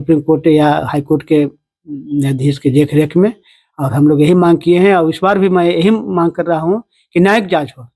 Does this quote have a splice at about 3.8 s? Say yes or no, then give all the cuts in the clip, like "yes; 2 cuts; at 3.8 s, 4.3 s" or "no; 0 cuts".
no; 0 cuts